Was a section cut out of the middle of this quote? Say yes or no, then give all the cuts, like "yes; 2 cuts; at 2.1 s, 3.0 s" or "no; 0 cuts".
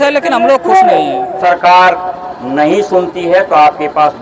yes; 1 cut; at 1.4 s